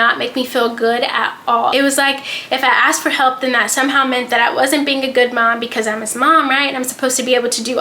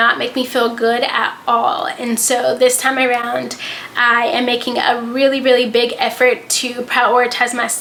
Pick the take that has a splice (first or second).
first